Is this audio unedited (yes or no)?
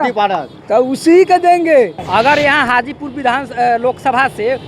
no